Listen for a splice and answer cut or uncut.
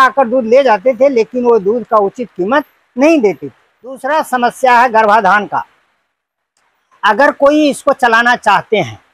cut